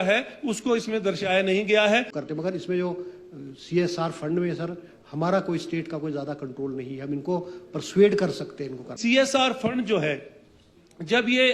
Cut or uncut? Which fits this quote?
cut